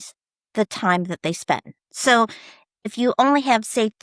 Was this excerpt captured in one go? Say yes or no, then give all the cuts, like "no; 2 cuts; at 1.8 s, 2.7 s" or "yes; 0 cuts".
no; 1 cut; at 2.8 s